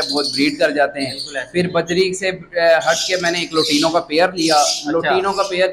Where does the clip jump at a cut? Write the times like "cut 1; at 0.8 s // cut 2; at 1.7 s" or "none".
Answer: none

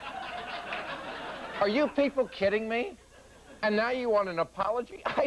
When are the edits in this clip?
cut 1; at 3.6 s

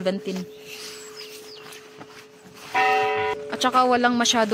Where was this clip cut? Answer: cut 1; at 3.3 s

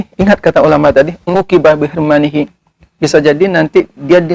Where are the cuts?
cut 1; at 1.3 s

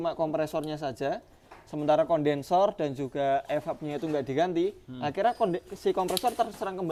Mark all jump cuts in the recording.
none

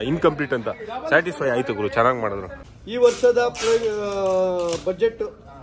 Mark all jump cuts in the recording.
cut 1; at 2.5 s

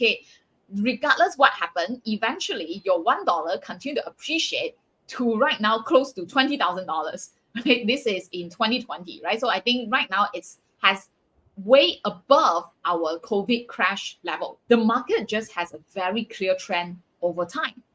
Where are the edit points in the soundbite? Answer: cut 1; at 14.5 s

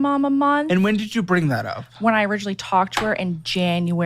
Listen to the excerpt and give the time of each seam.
none

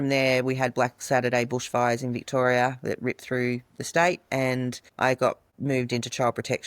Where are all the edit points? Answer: cut 1; at 4.8 s // cut 2; at 5.5 s

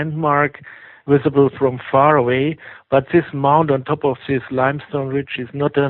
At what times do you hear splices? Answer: cut 1; at 3.1 s

